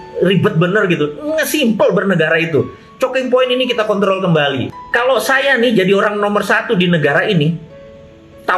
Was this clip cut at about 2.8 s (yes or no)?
no